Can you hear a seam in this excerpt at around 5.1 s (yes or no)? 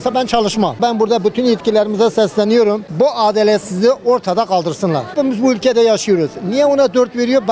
yes